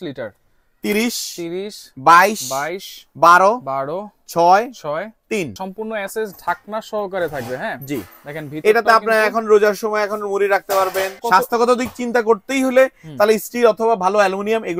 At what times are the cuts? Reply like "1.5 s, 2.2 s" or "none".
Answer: 5.5 s, 11.1 s